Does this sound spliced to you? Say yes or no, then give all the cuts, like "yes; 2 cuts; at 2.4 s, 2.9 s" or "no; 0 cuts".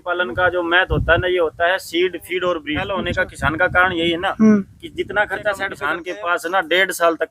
yes; 2 cuts; at 2.9 s, 5.7 s